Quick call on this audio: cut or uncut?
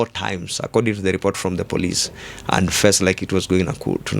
uncut